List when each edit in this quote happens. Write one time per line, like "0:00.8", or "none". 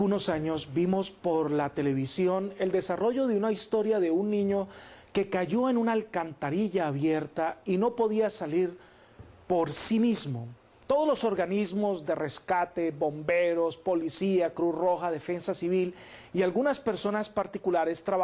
0:01.1